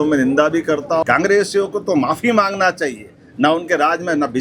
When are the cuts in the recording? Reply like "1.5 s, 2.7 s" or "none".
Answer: 1.0 s

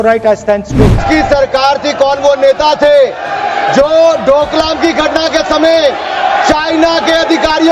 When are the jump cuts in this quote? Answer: 1.0 s

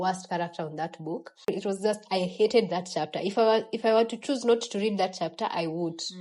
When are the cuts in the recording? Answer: 1.5 s

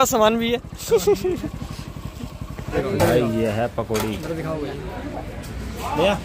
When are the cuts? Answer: 2.8 s

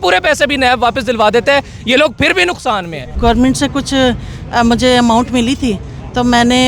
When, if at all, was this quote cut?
3.1 s

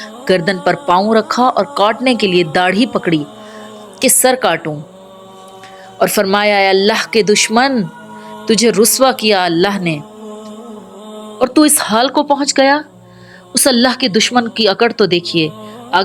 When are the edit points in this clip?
none

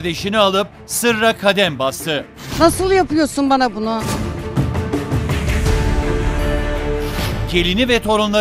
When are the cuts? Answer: none

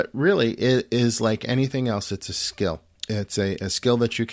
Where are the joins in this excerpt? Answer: 2.9 s

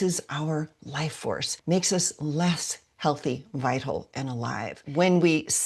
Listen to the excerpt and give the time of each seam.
4.8 s

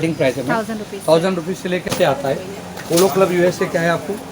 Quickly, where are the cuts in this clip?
1.9 s

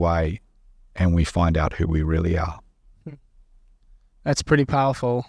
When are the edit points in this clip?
none

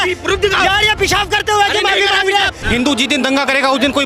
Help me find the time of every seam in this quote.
2.6 s

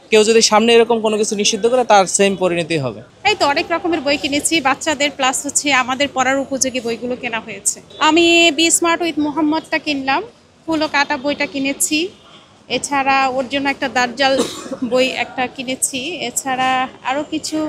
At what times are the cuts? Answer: none

